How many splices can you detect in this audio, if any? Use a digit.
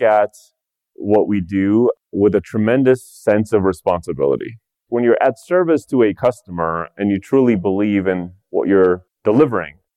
1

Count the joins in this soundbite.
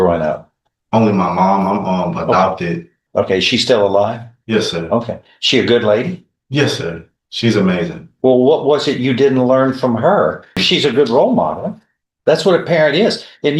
3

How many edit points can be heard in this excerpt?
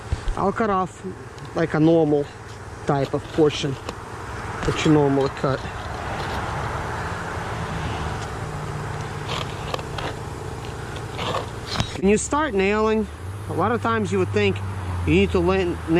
1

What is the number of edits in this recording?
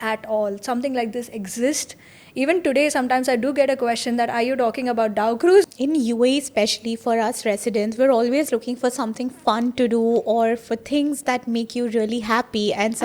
1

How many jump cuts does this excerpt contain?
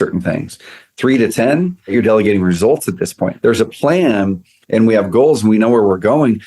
2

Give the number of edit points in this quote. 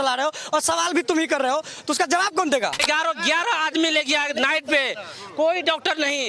1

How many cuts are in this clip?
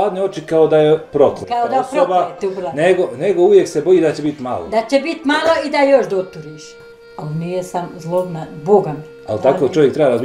1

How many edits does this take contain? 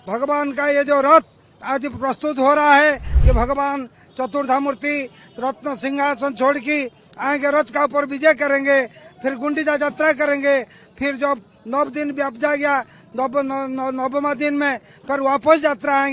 1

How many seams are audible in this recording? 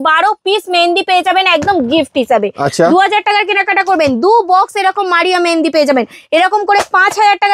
0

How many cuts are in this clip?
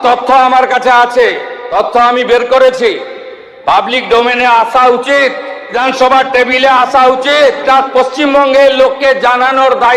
3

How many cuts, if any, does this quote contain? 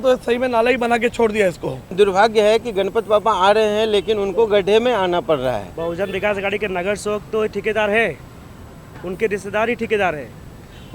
2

